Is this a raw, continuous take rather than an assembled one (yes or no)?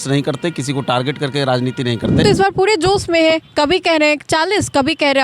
no